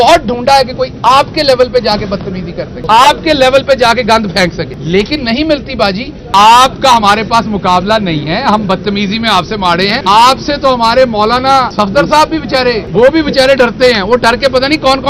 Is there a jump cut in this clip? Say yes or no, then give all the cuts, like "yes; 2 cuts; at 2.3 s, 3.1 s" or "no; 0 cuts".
yes; 6 cuts; at 2.8 s, 4.8 s, 6.1 s, 10.0 s, 11.7 s, 12.8 s